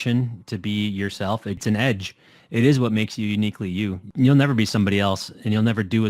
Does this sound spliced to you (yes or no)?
yes